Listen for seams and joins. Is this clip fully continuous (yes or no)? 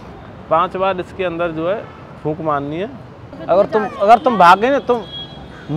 no